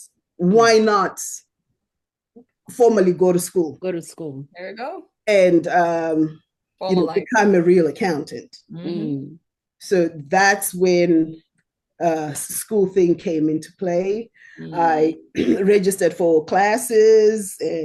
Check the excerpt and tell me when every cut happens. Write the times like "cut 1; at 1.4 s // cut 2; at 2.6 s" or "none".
none